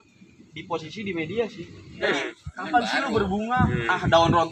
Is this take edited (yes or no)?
yes